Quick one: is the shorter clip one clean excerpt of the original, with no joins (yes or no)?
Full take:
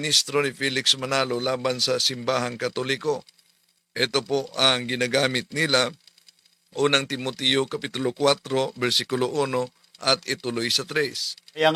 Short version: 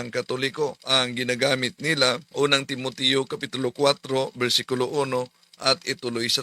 no